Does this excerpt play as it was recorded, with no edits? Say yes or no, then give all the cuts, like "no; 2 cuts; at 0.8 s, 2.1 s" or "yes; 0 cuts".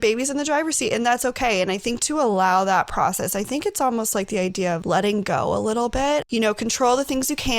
no; 2 cuts; at 4.8 s, 6.2 s